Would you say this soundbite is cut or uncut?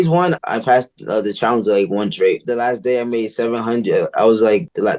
uncut